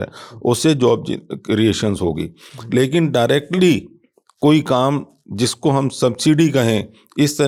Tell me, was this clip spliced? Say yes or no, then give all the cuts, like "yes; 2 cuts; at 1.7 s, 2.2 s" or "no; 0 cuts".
no; 0 cuts